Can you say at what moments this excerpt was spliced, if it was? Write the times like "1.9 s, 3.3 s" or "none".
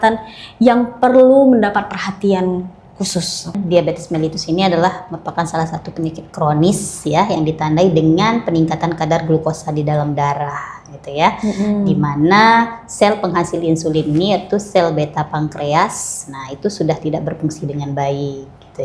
3.6 s